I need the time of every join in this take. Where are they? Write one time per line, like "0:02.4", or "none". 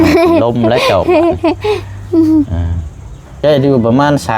0:03.4